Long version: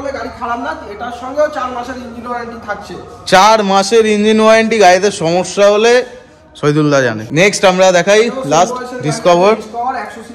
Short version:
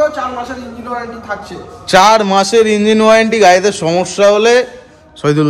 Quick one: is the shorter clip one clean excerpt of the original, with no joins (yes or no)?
yes